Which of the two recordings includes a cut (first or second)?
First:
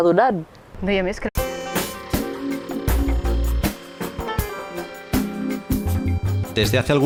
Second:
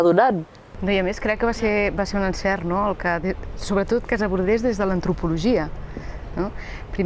second